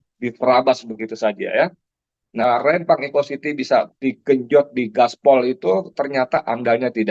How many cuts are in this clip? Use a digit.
1